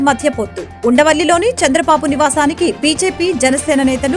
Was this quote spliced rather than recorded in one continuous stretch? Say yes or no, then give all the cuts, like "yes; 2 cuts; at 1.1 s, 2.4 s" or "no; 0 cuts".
no; 0 cuts